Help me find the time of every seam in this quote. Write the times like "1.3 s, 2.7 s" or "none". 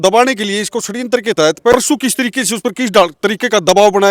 1.7 s